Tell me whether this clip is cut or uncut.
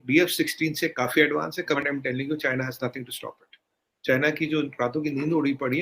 cut